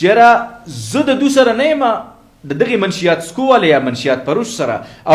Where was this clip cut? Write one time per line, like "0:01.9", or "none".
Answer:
none